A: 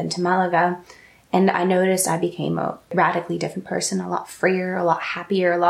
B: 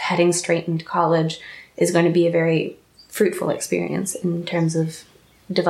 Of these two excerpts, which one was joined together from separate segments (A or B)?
A